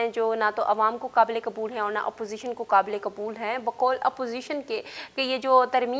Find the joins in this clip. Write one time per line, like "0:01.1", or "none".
none